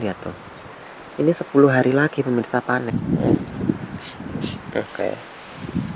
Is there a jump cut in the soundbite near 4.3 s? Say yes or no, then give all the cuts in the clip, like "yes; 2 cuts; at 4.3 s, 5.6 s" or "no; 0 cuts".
no; 1 cut; at 2.9 s